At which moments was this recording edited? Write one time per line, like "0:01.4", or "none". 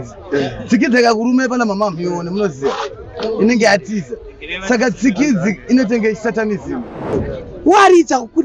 0:07.3